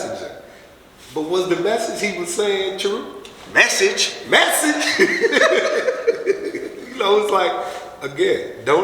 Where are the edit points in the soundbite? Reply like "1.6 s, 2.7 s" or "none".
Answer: 6.8 s